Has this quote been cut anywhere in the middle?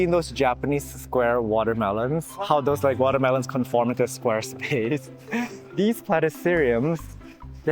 no; 0 cuts

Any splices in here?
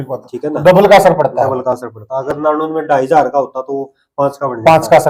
no; 0 cuts

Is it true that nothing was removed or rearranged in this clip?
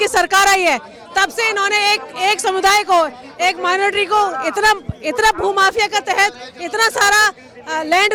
yes; 0 cuts

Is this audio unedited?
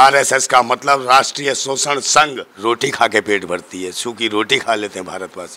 no; 1 cut; at 2.5 s

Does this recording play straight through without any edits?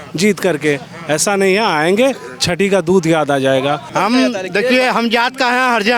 no; 1 cut; at 3.8 s

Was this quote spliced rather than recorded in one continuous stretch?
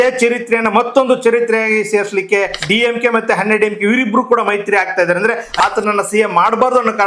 yes; 2 cuts; at 2.6 s, 5.5 s

